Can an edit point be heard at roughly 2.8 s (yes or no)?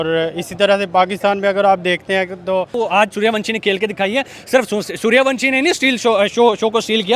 yes